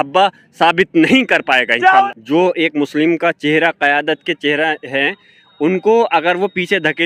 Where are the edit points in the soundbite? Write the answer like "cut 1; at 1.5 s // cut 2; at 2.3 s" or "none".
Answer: cut 1; at 2.1 s